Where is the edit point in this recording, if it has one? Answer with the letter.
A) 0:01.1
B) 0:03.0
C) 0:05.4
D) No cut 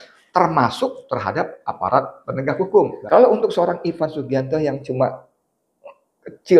B